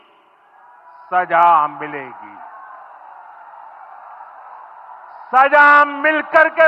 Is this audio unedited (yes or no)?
yes